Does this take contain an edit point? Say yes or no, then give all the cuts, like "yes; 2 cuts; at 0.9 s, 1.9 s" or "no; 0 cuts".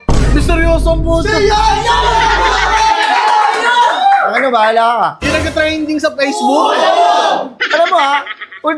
no; 0 cuts